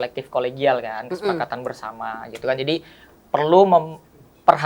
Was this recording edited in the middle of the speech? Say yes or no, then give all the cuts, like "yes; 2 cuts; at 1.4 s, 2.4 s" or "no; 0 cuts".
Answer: no; 0 cuts